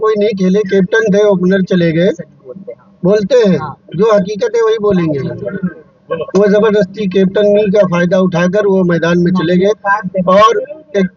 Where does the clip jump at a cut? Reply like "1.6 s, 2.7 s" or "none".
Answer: none